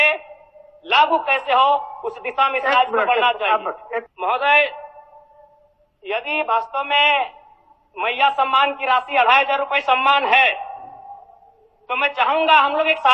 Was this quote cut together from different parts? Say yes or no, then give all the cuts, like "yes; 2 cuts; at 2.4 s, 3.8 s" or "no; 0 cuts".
yes; 1 cut; at 4.1 s